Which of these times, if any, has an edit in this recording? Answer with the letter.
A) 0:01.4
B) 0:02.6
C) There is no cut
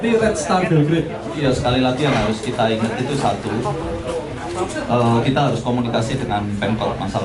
A